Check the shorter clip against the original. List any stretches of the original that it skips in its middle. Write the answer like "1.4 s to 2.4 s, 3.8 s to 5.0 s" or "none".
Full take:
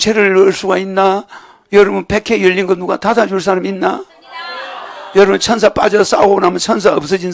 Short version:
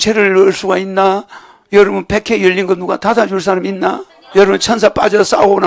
4.1 s to 4.9 s